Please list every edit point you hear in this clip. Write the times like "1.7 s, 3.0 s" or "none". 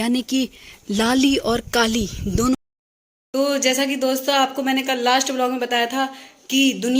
2.6 s